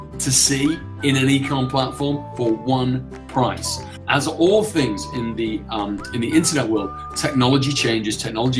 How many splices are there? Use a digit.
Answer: 1